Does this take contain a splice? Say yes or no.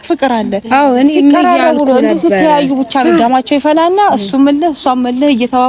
no